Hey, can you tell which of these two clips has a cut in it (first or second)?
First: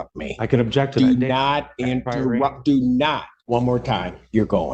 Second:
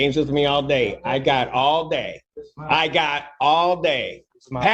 first